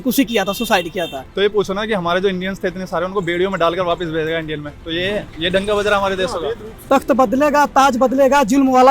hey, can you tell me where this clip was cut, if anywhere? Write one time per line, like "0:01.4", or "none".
0:01.2
0:06.8